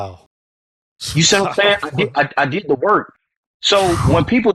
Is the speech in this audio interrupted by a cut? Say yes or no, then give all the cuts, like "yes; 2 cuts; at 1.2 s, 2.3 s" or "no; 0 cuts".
no; 0 cuts